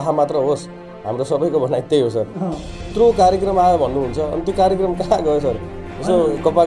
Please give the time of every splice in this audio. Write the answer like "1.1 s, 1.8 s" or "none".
2.9 s